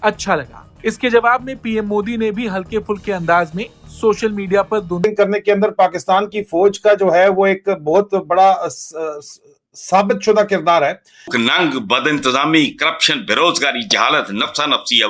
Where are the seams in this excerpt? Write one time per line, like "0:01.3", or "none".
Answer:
0:05.0
0:11.3